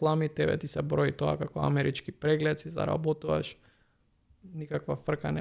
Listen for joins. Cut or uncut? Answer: uncut